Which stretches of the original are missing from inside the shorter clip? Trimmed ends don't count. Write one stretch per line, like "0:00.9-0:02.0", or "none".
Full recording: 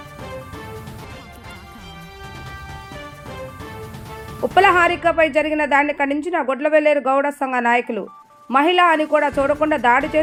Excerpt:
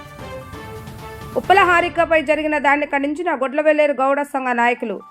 0:01.0-0:04.0